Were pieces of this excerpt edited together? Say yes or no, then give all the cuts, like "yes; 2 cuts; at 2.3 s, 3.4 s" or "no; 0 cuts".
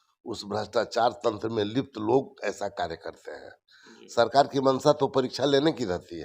no; 0 cuts